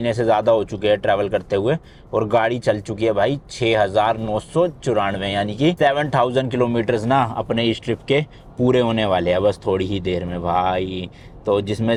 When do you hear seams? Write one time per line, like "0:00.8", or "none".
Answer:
none